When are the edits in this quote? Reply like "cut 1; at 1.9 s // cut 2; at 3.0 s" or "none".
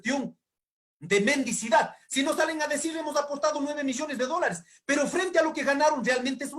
none